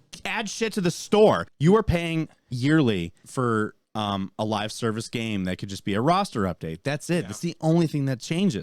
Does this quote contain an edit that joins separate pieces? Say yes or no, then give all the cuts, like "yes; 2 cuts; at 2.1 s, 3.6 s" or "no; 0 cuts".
yes; 3 cuts; at 1.5 s, 3.2 s, 3.8 s